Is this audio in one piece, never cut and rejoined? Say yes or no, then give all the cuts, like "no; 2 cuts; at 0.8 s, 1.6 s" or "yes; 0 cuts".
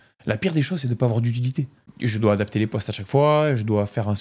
no; 1 cut; at 1.8 s